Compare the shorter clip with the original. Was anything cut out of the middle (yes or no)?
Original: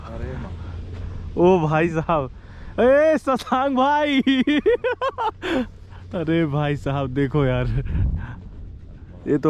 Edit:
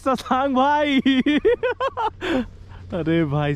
no